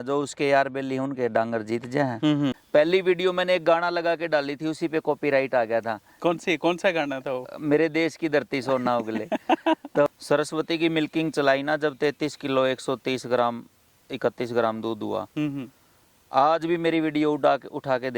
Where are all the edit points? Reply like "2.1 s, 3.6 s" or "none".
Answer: 2.6 s, 10.1 s

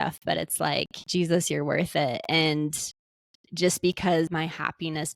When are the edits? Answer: 1.0 s, 4.3 s

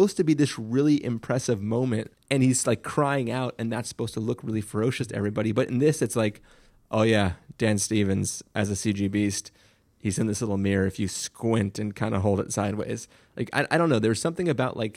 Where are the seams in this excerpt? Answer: 2.1 s

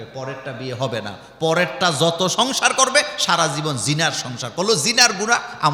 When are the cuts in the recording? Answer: none

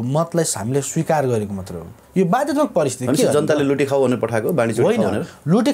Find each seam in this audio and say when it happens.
none

